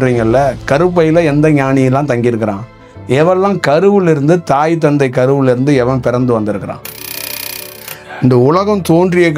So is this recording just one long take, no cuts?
no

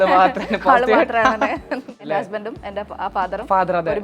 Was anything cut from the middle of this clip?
yes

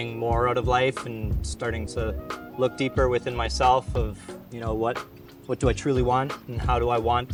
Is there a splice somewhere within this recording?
no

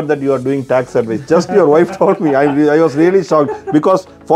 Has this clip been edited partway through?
no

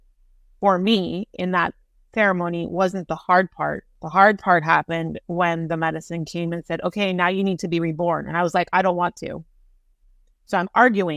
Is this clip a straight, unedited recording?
no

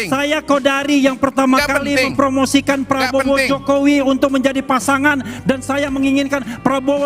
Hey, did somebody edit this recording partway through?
no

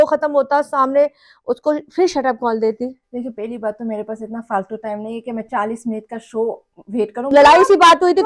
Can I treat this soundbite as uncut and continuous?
no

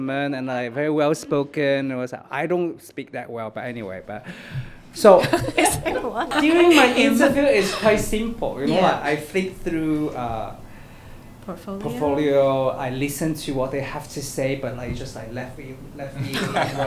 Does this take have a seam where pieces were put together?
yes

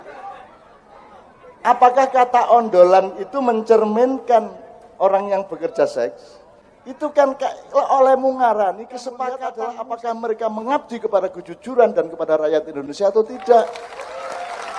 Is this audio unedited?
no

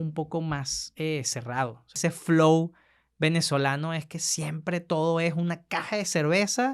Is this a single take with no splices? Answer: no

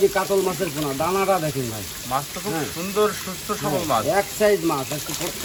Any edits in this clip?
no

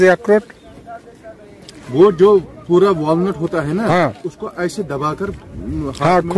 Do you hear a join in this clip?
no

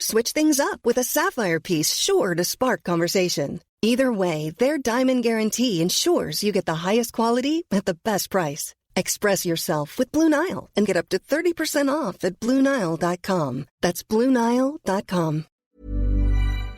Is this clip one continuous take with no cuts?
no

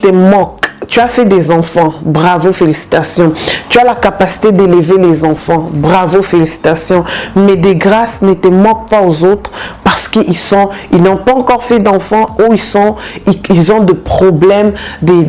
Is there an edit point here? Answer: no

